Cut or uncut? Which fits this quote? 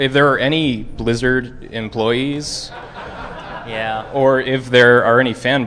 uncut